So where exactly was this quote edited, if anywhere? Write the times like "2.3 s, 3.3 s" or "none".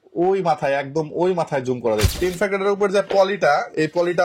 2.1 s